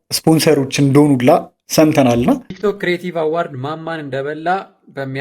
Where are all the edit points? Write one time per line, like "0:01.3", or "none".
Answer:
0:02.4